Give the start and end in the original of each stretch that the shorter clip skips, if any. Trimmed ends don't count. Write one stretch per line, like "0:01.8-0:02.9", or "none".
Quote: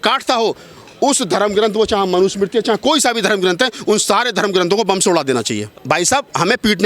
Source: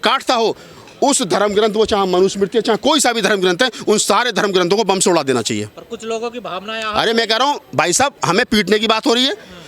0:05.8-0:07.6